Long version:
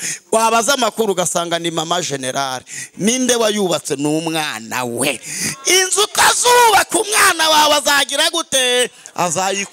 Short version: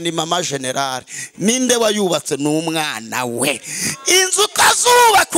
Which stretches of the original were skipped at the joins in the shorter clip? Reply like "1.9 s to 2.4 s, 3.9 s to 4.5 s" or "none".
none